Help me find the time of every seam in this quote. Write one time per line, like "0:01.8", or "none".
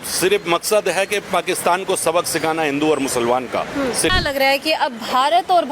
0:04.1